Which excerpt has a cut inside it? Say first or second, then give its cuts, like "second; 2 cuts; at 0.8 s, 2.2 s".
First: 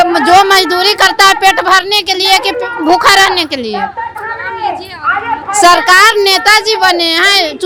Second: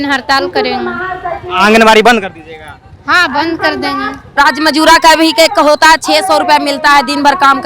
second; 1 cut; at 4.4 s